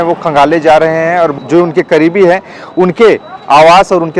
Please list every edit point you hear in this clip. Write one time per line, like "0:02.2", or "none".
0:01.4